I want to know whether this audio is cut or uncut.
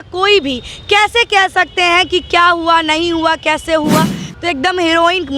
cut